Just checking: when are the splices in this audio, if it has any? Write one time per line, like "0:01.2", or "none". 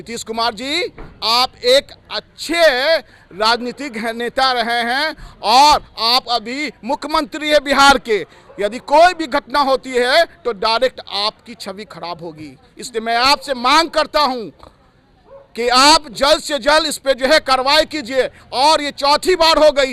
none